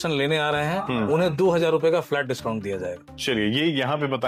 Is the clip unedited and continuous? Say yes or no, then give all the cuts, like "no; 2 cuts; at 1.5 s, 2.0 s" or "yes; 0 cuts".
yes; 0 cuts